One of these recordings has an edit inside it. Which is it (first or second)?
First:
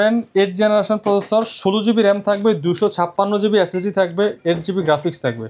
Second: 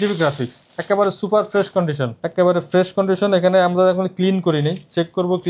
second